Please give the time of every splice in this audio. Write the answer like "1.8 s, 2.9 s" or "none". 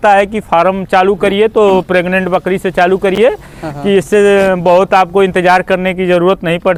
none